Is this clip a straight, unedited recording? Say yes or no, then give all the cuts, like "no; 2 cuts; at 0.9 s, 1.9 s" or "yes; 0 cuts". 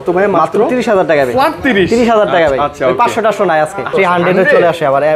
no; 1 cut; at 3.9 s